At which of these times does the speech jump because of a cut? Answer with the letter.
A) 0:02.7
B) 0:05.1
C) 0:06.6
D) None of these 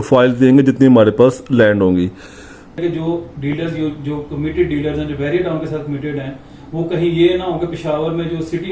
A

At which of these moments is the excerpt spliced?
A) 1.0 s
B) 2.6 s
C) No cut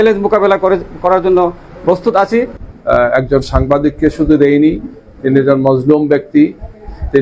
B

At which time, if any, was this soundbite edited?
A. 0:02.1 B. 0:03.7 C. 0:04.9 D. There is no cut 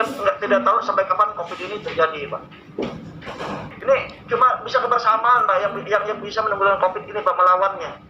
B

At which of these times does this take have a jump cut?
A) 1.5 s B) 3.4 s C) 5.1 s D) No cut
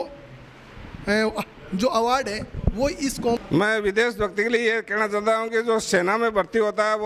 B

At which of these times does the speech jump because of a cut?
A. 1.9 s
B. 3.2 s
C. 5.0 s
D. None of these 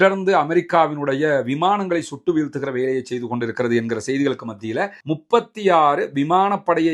C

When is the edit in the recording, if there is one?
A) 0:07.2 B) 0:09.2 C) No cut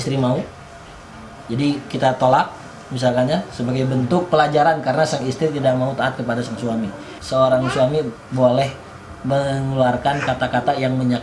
A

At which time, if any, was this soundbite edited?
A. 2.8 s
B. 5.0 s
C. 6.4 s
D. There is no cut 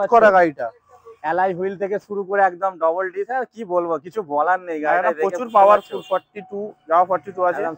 D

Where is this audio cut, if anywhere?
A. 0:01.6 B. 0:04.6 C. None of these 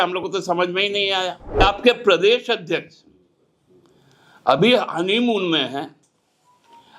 A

